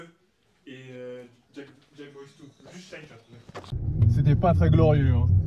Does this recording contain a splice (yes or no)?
yes